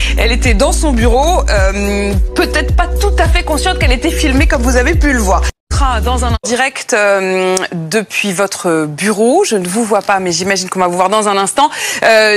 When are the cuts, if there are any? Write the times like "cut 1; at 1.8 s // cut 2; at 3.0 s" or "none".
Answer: none